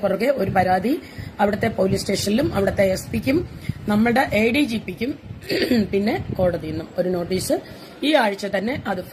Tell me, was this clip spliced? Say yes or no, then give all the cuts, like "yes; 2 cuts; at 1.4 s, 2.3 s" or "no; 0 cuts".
no; 0 cuts